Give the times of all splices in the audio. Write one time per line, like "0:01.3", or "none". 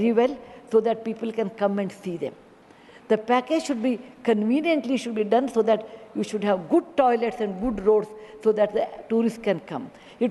none